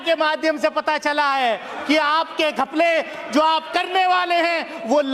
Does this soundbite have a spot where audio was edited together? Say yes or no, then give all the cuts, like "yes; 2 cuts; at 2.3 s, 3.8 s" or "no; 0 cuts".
no; 0 cuts